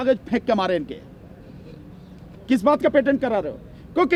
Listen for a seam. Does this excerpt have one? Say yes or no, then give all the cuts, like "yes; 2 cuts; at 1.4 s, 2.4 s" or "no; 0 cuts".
no; 0 cuts